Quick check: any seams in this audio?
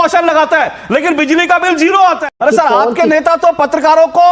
yes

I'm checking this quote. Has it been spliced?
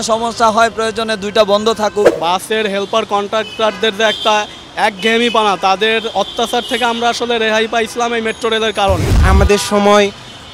yes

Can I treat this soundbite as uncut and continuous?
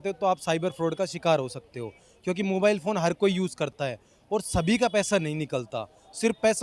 yes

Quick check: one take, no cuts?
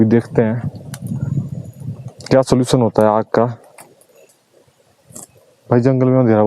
no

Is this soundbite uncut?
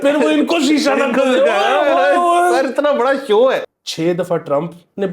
no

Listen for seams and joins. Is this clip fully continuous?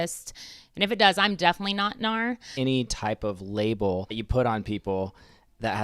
no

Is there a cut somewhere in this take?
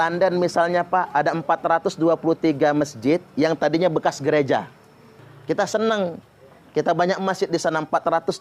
yes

